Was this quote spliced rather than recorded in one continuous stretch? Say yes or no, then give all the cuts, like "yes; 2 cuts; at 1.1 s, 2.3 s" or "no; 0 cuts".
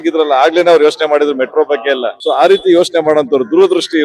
yes; 1 cut; at 2.1 s